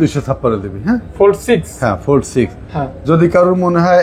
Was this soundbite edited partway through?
no; 0 cuts

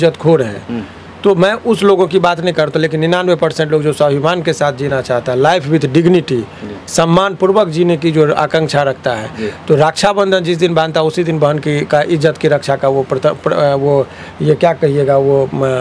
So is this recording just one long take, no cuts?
yes; 0 cuts

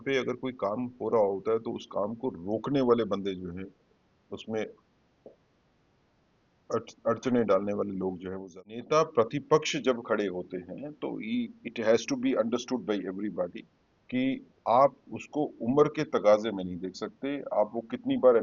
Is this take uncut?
no; 1 cut; at 8.3 s

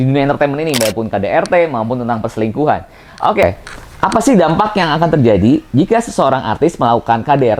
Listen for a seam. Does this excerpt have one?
yes; 1 cut; at 3.5 s

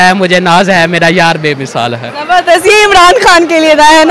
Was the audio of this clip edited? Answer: no; 0 cuts

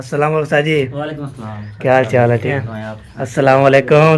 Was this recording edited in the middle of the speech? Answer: yes; 1 cut; at 2.5 s

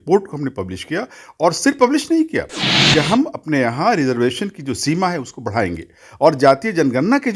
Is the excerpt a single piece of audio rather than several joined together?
no; 1 cut; at 2.8 s

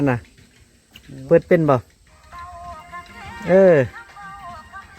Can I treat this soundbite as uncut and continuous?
yes; 0 cuts

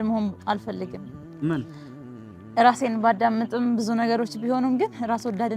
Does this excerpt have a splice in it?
no; 0 cuts

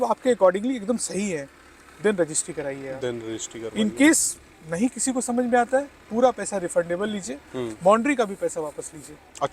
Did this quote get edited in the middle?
no; 0 cuts

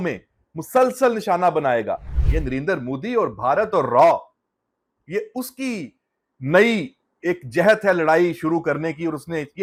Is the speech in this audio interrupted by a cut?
no; 0 cuts

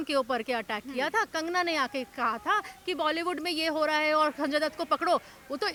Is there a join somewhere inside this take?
no; 0 cuts

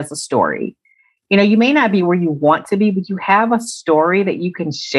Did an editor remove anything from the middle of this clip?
no; 0 cuts

